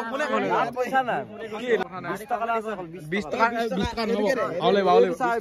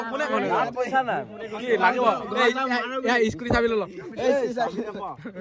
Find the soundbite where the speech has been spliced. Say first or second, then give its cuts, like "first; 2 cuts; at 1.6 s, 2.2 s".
first; 1 cut; at 1.8 s